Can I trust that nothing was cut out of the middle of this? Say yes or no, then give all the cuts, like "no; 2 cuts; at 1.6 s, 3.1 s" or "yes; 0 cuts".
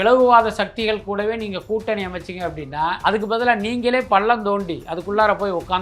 no; 1 cut; at 3.0 s